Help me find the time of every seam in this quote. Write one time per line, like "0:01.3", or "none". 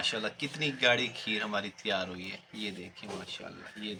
none